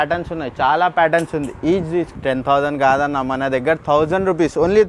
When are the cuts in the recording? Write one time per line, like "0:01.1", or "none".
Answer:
0:02.1